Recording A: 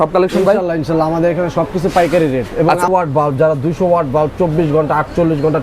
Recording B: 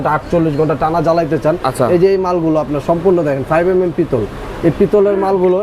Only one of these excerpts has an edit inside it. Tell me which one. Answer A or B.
A